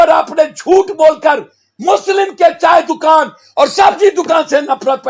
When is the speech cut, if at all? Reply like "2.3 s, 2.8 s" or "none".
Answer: none

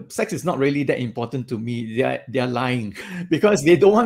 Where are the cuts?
3.0 s

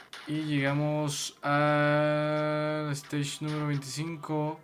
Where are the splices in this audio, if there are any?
none

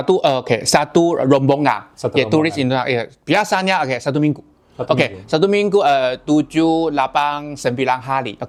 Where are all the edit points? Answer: none

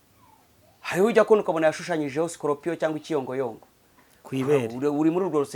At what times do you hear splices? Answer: none

